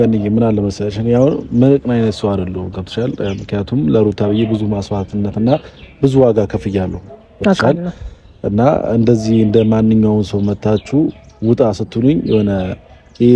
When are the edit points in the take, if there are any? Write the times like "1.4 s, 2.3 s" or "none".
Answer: none